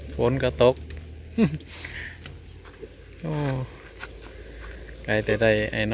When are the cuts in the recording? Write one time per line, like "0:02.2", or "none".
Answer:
none